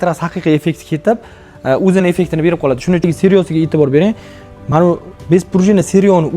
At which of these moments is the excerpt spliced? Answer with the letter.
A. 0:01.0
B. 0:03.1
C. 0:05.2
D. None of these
B